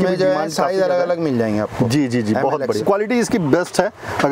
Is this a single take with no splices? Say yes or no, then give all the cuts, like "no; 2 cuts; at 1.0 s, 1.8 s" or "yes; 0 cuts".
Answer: no; 1 cut; at 2.8 s